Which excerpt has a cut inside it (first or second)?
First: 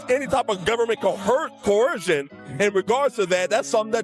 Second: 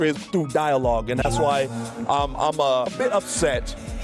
second